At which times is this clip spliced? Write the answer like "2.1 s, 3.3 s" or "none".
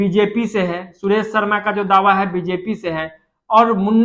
none